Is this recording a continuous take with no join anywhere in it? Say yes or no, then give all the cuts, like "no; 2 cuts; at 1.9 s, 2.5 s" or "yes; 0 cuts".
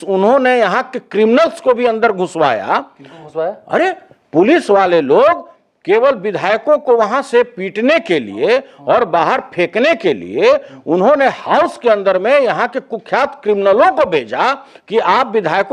yes; 0 cuts